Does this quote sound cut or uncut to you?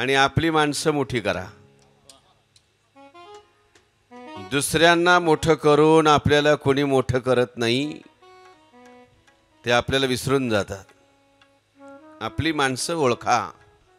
uncut